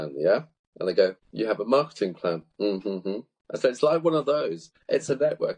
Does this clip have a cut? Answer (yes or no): yes